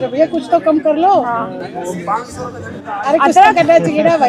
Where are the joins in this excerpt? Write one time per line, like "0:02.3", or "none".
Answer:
none